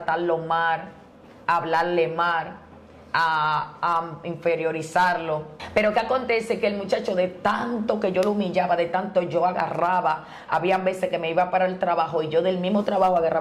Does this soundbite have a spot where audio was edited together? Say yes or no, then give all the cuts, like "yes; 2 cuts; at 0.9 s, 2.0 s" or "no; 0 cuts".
yes; 1 cut; at 5.6 s